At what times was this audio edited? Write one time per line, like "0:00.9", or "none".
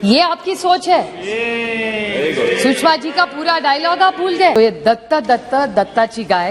0:04.5

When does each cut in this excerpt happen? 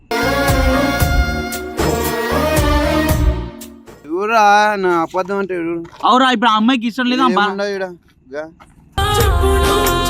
0:04.0

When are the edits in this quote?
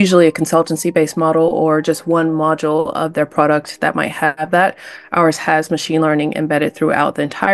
none

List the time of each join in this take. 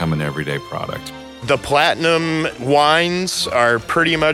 0:01.1
0:02.6

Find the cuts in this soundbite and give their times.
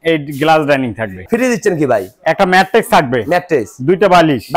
0:01.2

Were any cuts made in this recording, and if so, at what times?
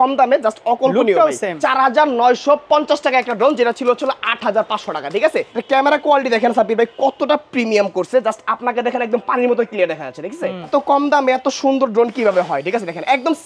0:01.6
0:05.5
0:10.7

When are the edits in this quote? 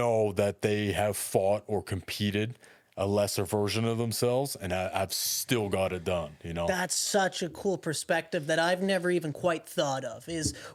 none

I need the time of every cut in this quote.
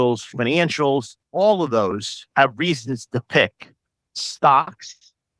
0:01.2

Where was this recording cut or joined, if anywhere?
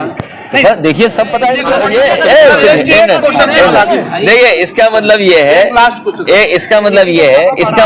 0:01.7

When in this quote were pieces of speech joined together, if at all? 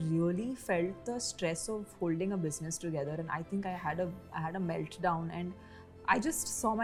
none

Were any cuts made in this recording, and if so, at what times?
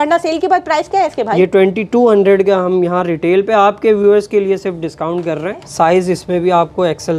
0:05.7

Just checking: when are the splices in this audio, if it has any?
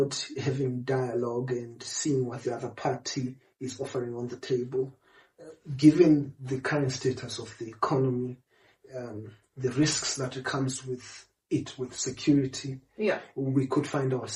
none

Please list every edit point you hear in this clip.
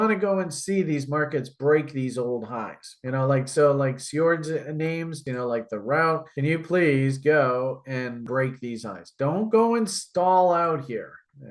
0:05.2
0:08.2

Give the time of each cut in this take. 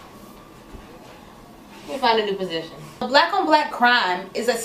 0:03.6

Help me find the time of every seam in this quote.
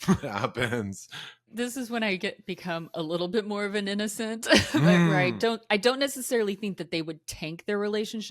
0:01.5

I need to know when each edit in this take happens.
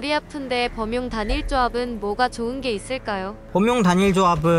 0:03.4

